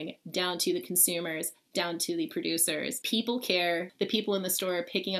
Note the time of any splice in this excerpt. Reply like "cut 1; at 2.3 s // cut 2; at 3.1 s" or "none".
cut 1; at 3.0 s // cut 2; at 3.9 s